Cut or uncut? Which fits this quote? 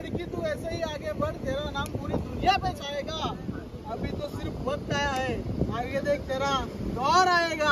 uncut